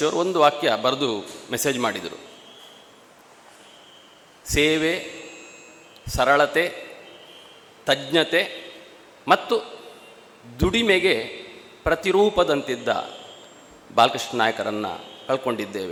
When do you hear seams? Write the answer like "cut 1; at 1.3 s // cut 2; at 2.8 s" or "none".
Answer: none